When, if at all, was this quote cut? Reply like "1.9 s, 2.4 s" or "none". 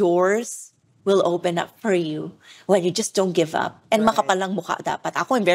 none